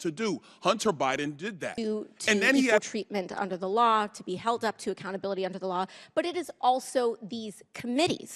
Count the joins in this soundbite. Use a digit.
1